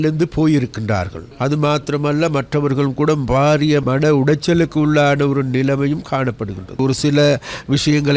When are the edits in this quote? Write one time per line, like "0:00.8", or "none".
0:01.2
0:03.8
0:06.8